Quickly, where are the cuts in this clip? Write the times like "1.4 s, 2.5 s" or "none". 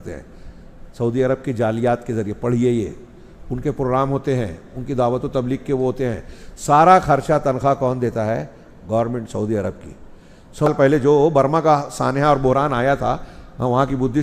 10.7 s